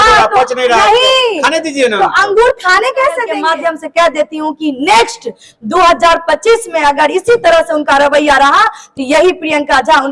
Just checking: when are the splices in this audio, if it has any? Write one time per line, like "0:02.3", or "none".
0:03.3